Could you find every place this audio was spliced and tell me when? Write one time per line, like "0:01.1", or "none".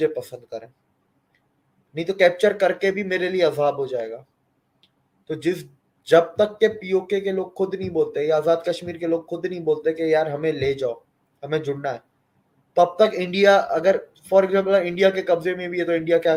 none